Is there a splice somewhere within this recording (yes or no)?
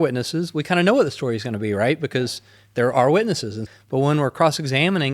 yes